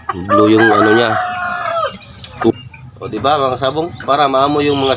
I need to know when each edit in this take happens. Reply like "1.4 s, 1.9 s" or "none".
2.5 s